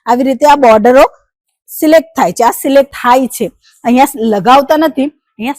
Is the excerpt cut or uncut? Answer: uncut